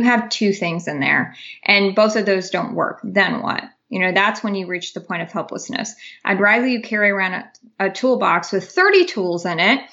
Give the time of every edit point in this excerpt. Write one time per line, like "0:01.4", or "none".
none